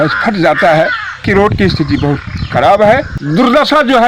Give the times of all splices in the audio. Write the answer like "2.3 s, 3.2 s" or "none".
1.2 s, 3.2 s